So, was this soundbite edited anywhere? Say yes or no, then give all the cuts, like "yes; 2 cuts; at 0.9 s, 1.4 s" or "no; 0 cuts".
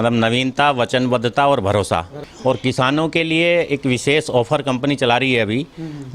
yes; 1 cut; at 2.2 s